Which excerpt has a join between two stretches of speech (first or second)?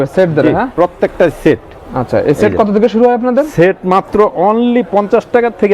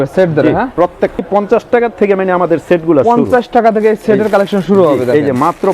second